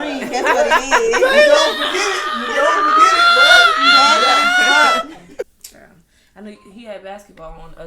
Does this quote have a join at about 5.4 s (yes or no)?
yes